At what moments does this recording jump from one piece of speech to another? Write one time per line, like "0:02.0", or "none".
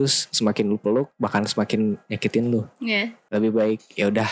0:03.2